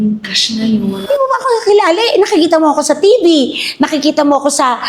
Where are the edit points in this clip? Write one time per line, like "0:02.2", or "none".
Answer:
0:01.0